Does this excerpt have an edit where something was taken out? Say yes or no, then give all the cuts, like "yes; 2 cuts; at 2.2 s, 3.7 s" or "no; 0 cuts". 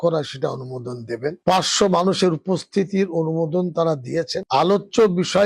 yes; 1 cut; at 4.4 s